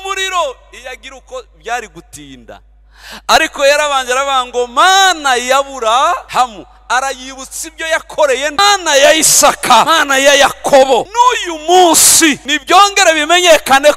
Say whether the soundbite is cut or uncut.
cut